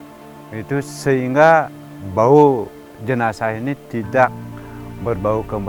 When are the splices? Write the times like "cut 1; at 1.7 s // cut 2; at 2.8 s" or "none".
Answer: none